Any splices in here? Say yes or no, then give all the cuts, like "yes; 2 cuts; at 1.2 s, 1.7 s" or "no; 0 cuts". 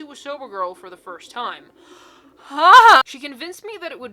yes; 1 cut; at 3.1 s